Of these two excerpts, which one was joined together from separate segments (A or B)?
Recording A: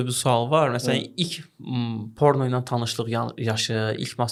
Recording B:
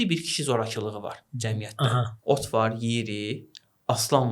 B